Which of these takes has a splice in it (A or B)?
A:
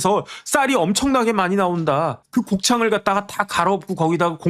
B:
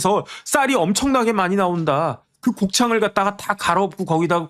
A